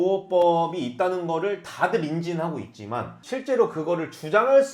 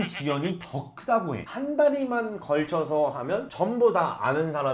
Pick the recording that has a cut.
second; 1 cut; at 1.4 s

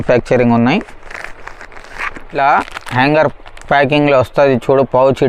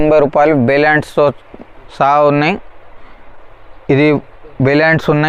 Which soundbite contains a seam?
first; 1 cut; at 2.4 s

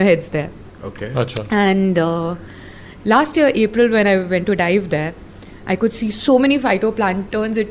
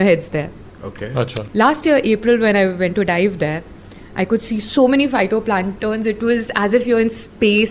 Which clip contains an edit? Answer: second; 1 cut; at 1.4 s

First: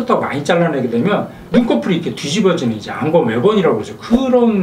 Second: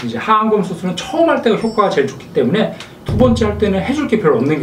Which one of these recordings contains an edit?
second; 1 cut; at 2.9 s

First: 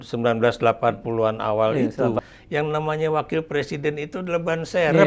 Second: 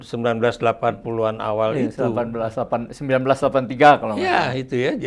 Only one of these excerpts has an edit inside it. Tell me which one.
first; 1 cut; at 2.2 s

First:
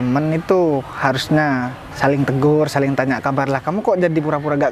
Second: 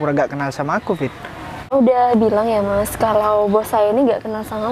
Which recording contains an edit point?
second; 1 cut; at 1.7 s

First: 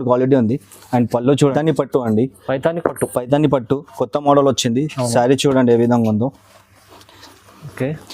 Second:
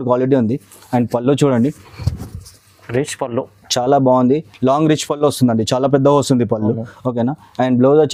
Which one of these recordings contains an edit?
first; 1 cut; at 1.5 s

